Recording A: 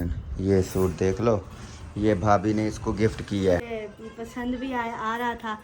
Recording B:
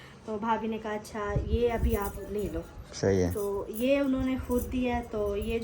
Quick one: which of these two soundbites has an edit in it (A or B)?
A